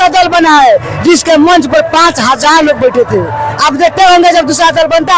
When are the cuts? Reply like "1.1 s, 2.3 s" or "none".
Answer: none